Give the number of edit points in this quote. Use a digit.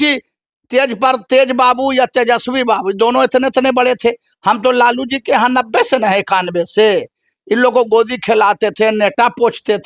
0